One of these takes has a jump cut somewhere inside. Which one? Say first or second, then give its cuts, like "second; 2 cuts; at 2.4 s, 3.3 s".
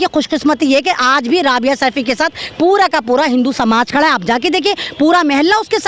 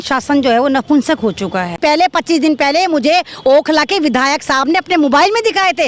second; 1 cut; at 1.8 s